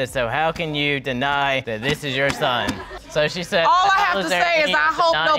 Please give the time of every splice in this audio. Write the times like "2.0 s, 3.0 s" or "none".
none

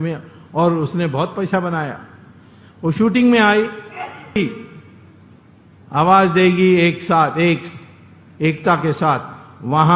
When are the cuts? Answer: 4.4 s

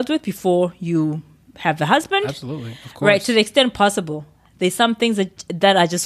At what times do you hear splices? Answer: none

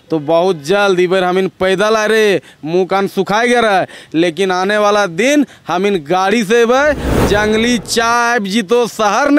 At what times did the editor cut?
7.1 s

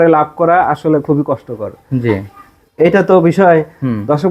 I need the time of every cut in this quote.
none

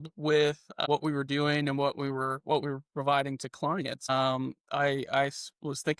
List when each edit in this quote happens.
0.8 s, 4.1 s

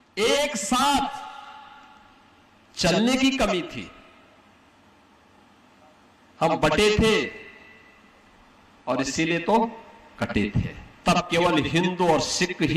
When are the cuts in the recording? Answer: 10.8 s

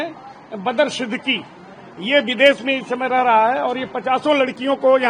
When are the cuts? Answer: none

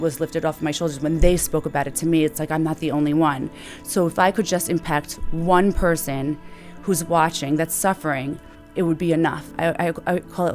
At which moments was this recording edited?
8.6 s, 9.5 s

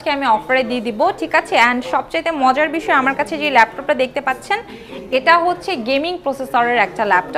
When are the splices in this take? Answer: none

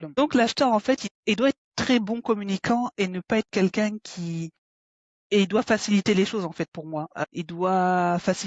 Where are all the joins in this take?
1.1 s, 7.1 s

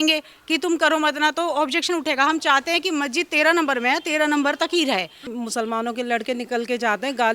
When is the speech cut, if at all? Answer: 5.4 s

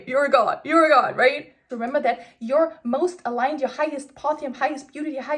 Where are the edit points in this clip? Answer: 1.7 s

